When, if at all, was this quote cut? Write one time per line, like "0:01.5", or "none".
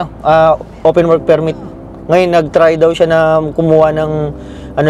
none